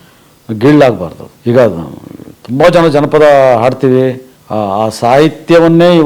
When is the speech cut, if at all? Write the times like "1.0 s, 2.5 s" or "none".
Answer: 1.3 s, 4.3 s